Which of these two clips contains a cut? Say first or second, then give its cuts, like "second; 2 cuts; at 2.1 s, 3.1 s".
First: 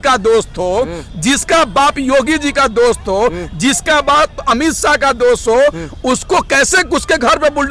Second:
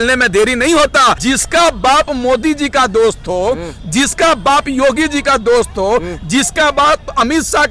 second; 1 cut; at 1.2 s